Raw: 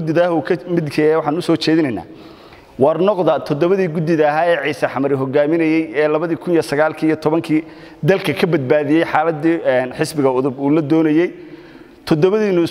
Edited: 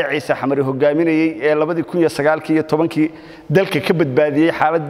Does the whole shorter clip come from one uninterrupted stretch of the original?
yes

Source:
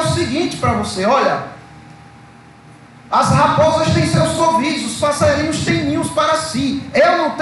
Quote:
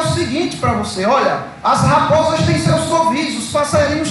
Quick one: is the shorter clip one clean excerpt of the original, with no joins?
no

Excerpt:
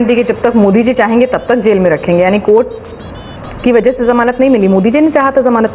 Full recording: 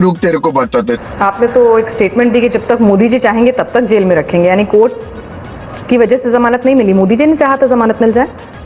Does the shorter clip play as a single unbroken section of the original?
yes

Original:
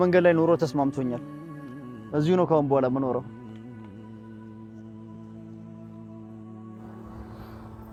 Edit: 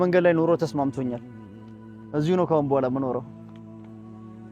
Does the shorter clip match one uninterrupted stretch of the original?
no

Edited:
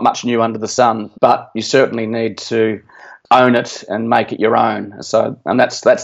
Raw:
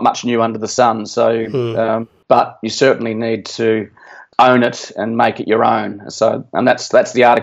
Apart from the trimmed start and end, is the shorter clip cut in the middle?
yes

